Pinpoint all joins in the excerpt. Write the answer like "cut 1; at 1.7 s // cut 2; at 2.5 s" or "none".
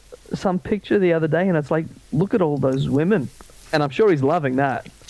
cut 1; at 3.6 s

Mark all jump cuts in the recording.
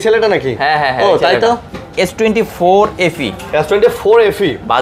cut 1; at 1.7 s

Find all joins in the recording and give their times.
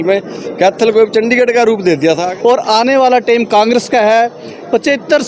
cut 1; at 2.3 s

